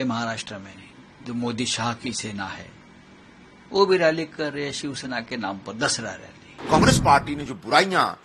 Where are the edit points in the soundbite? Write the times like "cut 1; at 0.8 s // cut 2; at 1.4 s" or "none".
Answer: cut 1; at 6.5 s